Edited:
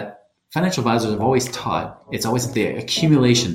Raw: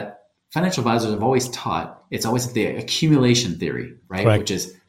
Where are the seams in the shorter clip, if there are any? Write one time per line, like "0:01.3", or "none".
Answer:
none